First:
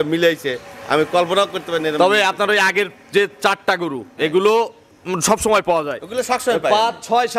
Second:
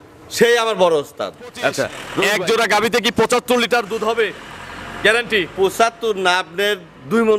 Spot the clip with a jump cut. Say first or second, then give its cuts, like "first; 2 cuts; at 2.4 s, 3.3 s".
second; 1 cut; at 2.0 s